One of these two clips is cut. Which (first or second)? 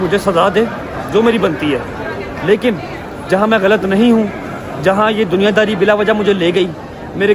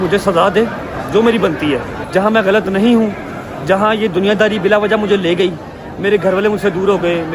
second